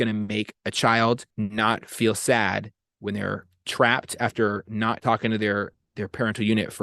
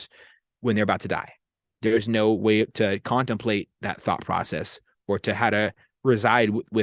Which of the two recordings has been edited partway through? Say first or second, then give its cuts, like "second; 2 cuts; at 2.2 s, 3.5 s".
first; 2 cuts; at 1.3 s, 5.0 s